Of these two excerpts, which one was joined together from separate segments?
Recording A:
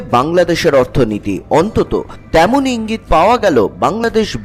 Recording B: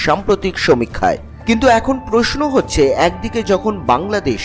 B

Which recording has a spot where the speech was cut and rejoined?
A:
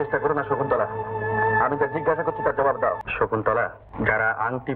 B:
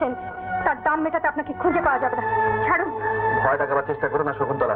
A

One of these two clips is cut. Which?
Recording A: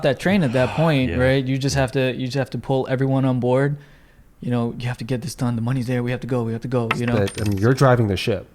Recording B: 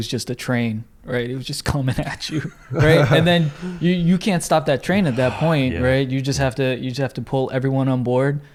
A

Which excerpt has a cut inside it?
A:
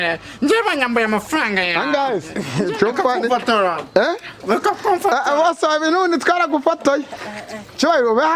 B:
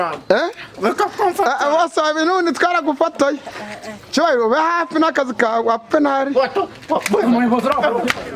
A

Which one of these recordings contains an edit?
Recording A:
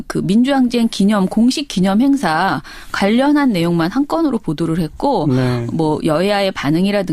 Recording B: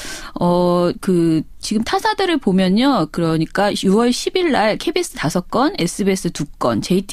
A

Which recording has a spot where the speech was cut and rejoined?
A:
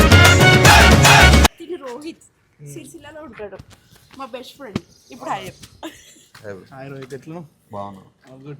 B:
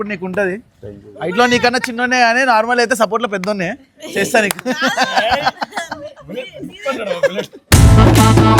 A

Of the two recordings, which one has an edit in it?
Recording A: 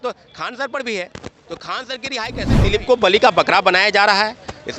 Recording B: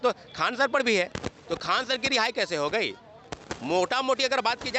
A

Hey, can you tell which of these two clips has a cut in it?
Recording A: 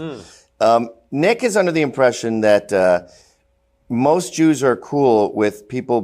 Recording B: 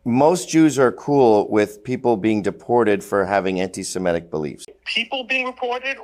B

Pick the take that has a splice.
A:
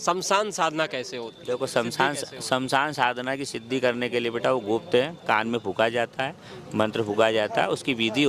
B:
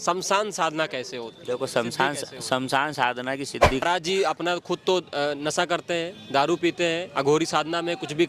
B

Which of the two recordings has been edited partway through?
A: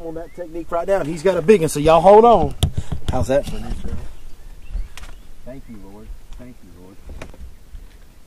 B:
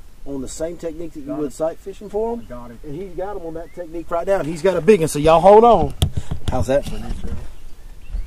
A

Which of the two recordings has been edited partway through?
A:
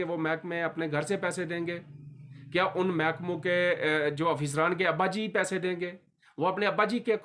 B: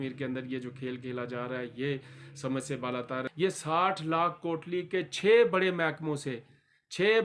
B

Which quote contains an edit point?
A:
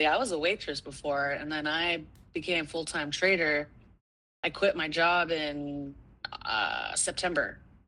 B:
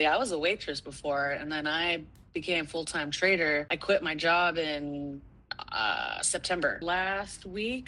B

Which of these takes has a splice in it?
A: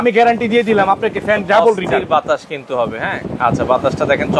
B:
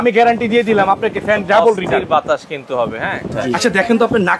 B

